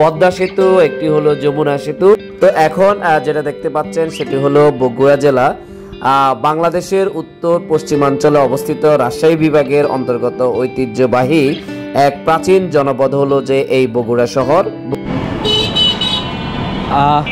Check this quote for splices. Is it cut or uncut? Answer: cut